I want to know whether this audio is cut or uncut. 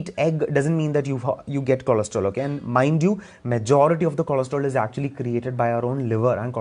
uncut